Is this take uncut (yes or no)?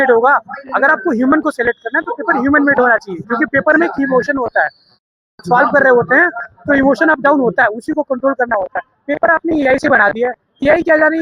yes